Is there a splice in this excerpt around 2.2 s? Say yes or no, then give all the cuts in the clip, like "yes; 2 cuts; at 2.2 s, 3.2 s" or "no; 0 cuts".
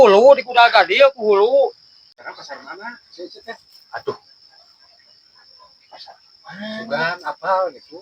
yes; 1 cut; at 2.2 s